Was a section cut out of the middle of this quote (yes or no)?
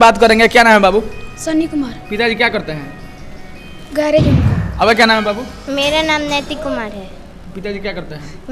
yes